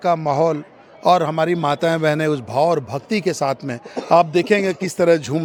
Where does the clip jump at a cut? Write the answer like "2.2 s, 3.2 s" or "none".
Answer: none